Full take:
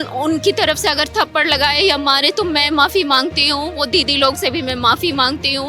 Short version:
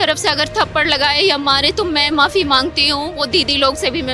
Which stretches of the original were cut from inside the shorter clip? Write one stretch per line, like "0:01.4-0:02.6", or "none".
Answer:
none